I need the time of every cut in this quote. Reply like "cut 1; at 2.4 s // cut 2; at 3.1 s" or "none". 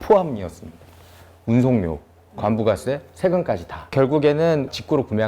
cut 1; at 3.9 s